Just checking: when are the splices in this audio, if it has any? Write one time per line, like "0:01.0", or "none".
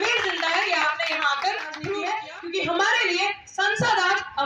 0:01.9